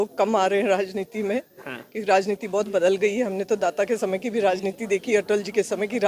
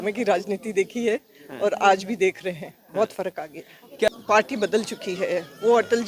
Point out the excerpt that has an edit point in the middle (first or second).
second